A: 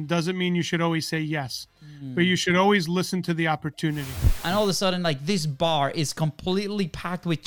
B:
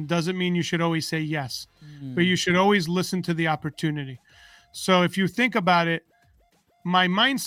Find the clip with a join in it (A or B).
A